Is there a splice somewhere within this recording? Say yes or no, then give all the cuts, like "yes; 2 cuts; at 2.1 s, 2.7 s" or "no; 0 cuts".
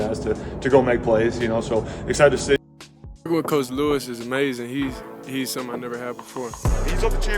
yes; 1 cut; at 2.6 s